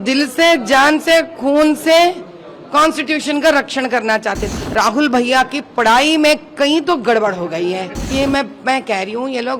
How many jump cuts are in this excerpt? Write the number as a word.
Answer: two